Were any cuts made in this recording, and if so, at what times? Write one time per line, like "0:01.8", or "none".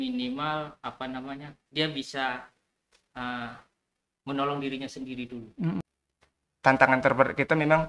0:05.8